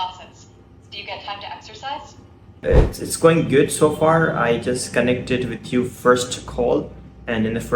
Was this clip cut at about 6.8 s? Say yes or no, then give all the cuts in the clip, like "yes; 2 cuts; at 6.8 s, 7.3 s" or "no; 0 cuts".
no; 1 cut; at 2.6 s